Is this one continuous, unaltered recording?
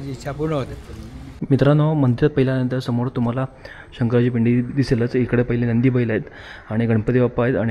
no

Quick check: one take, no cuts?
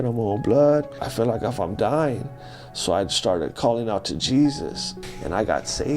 no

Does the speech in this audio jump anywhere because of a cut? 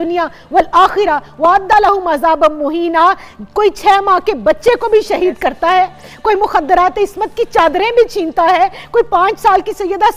no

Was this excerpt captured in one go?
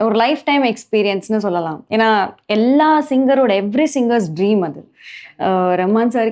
yes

